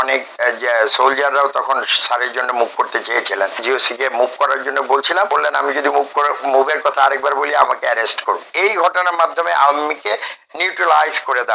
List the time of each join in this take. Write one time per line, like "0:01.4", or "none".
0:03.6
0:05.3
0:08.4